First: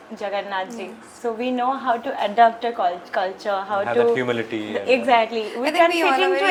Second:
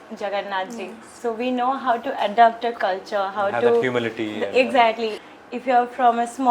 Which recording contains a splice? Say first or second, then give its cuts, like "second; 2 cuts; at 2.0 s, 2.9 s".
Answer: second; 2 cuts; at 2.7 s, 5.2 s